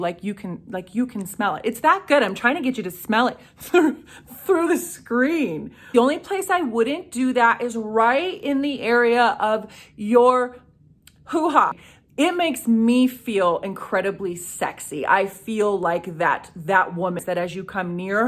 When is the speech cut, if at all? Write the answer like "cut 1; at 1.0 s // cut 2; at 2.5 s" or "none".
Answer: cut 1; at 5.7 s // cut 2; at 11.8 s // cut 3; at 17.2 s